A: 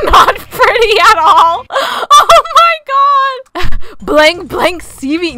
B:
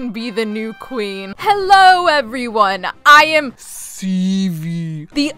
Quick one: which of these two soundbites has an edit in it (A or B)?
B